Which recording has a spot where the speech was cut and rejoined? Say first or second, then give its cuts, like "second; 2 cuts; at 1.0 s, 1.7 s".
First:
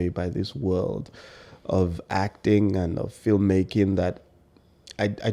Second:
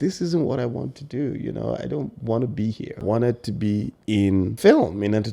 second; 2 cuts; at 3.0 s, 4.1 s